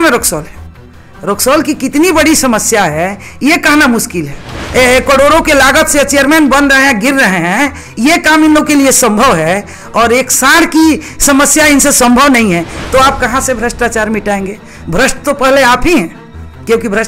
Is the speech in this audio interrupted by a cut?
yes; 2 cuts; at 4.6 s, 12.8 s

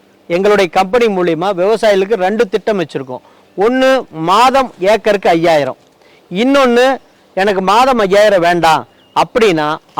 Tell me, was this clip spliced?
no; 0 cuts

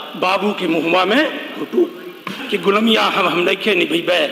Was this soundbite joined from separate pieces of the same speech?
yes; 1 cut; at 2.3 s

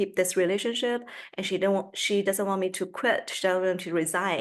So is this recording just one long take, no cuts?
yes; 0 cuts

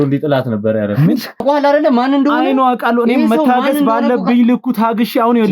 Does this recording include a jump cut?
yes; 1 cut; at 1.4 s

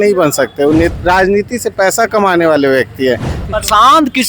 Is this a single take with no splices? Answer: no; 2 cuts; at 0.9 s, 3.4 s

